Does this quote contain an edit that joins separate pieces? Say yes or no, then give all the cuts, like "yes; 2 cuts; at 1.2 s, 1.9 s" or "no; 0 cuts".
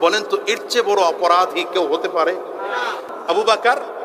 yes; 1 cut; at 3.1 s